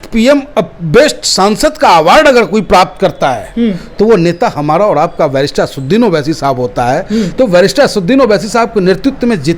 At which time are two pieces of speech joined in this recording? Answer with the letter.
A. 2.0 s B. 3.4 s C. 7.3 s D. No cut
D